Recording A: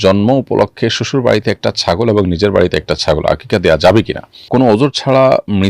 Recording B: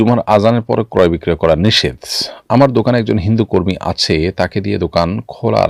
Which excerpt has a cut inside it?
A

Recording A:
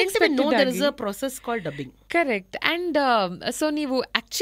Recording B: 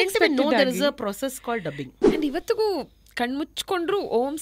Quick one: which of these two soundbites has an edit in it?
B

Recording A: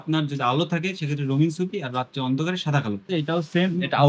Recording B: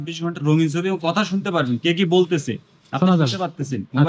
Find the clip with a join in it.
A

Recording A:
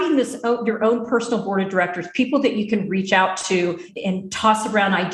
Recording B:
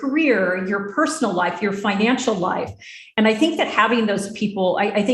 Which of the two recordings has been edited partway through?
A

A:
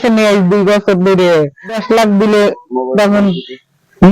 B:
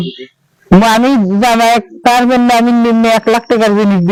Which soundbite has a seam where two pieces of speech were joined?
A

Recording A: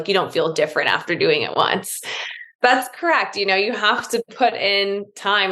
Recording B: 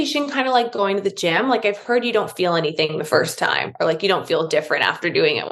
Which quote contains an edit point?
A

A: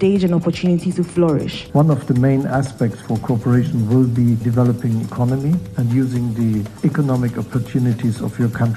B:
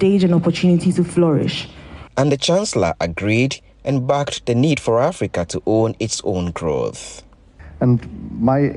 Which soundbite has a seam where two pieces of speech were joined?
A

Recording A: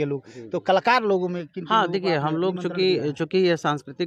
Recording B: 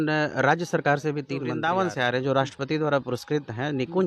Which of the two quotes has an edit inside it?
B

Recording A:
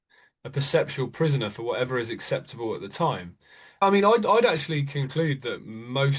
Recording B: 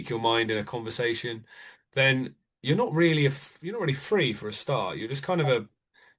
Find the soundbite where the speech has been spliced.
A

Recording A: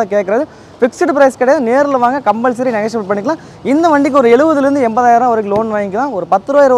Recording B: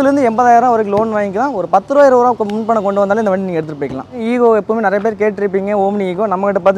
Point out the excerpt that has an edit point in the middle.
B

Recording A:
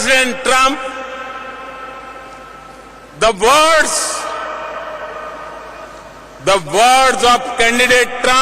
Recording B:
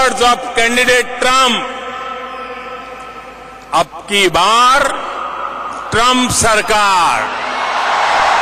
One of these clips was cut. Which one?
A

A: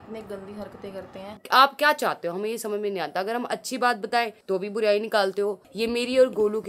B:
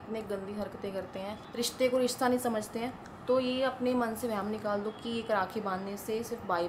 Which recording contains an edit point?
A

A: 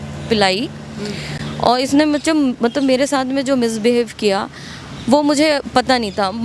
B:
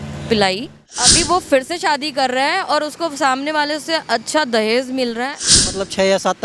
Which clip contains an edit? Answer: B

